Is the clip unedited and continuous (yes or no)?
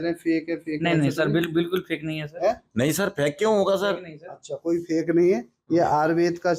yes